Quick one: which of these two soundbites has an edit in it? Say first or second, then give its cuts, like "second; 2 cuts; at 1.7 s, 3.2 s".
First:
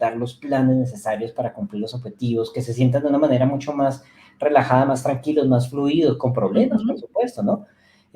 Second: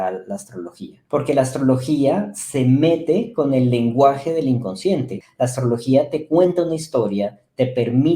second; 2 cuts; at 0.9 s, 5.2 s